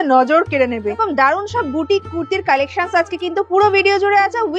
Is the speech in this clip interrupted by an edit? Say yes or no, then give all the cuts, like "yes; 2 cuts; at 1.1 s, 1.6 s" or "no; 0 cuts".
yes; 1 cut; at 1.0 s